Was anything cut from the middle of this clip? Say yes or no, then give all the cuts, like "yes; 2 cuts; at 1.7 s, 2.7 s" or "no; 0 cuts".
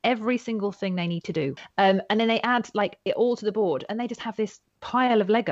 yes; 1 cut; at 1.6 s